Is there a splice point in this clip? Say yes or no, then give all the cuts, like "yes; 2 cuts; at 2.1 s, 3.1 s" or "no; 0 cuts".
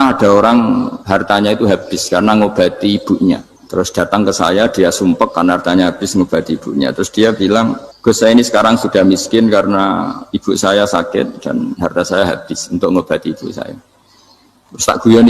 yes; 3 cuts; at 1.0 s, 3.5 s, 7.9 s